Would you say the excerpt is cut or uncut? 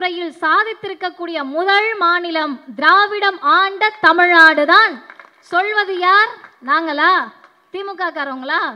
uncut